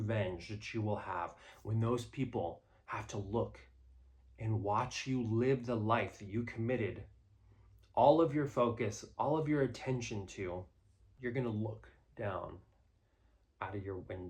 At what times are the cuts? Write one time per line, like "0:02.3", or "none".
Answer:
0:11.1